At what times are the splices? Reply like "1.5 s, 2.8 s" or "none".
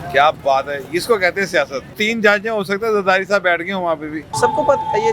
2.0 s, 4.2 s